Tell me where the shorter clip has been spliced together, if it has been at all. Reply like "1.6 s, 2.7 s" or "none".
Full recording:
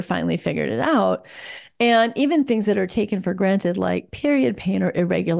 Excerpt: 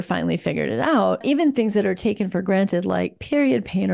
1.2 s